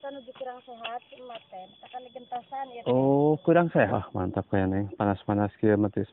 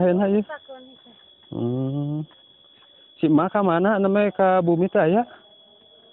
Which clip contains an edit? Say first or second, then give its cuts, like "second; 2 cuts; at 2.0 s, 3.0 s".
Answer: first; 1 cut; at 3.7 s